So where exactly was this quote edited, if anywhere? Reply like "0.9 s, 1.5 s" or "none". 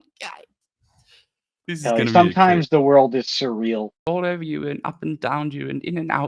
3.9 s